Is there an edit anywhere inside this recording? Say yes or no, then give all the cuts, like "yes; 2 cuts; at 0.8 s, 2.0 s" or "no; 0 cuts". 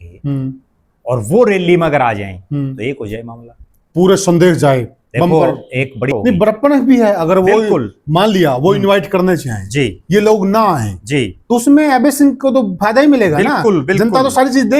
yes; 1 cut; at 6.1 s